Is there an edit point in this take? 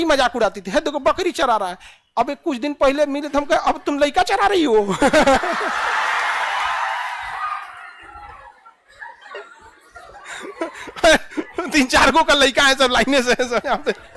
no; 0 cuts

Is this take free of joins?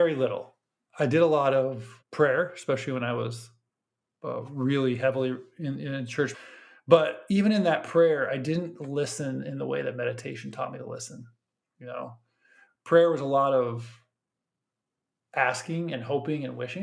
no; 1 cut; at 6.3 s

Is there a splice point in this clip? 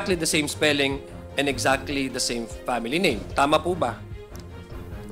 no; 0 cuts

